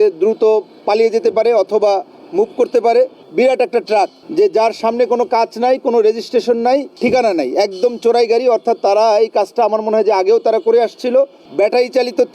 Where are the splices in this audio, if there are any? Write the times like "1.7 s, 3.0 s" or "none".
3.2 s, 4.2 s, 6.9 s, 11.4 s